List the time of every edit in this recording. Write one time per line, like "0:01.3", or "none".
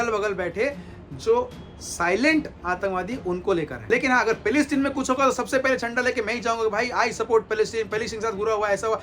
0:03.9